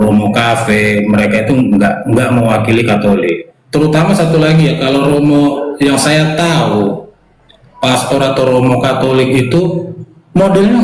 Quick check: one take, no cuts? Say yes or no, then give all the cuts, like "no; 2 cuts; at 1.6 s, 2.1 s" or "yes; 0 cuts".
yes; 0 cuts